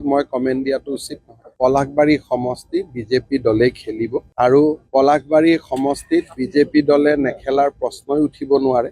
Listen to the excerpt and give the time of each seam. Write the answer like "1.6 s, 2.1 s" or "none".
none